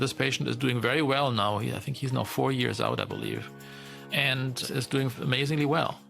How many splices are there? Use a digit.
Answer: 1